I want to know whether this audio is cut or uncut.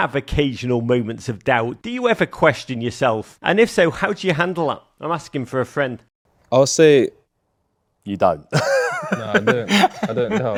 uncut